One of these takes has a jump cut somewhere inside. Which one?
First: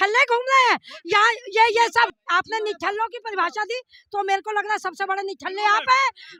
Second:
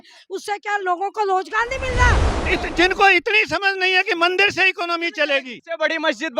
second; 2 cuts; at 2.4 s, 5.6 s

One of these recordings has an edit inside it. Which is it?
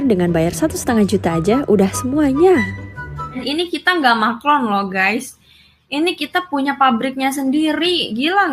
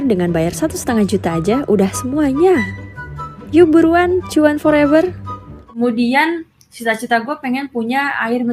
first; 1 cut; at 3.4 s

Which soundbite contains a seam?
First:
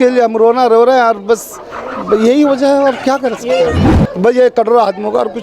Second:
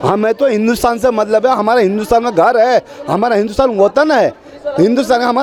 first; 1 cut; at 3.9 s

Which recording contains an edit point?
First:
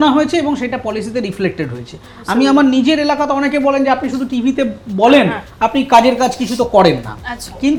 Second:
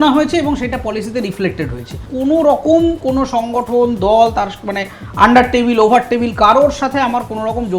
second; 1 cut; at 2.0 s

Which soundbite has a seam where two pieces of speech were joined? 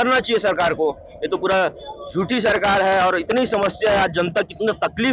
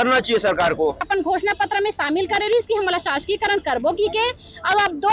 second; 1 cut; at 1.0 s

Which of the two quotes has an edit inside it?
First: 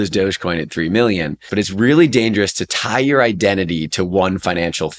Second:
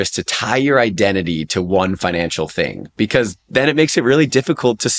first; 1 cut; at 1.4 s

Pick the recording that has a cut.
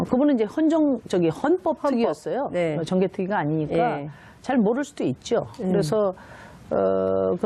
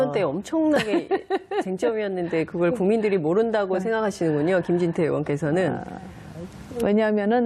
second; 1 cut; at 4.7 s

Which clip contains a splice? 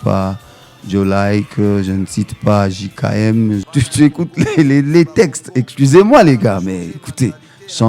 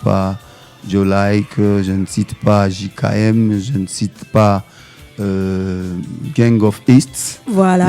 first; 1 cut; at 3.7 s

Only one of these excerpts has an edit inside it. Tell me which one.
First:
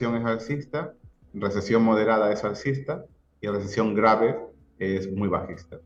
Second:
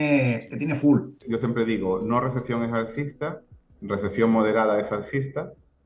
second; 1 cut; at 1.2 s

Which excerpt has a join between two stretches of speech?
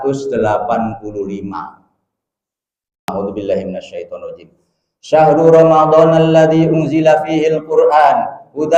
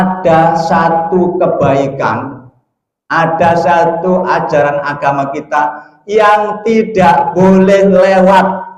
first; 1 cut; at 3.1 s

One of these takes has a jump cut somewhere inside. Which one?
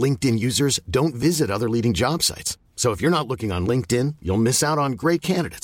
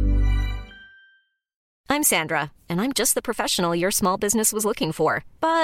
second; 1 cut; at 1.7 s

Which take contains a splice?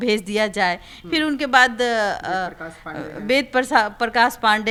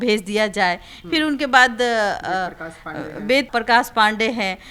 second; 1 cut; at 3.5 s

